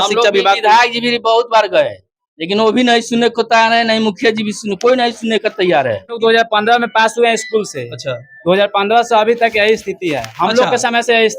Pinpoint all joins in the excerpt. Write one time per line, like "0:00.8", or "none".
0:06.2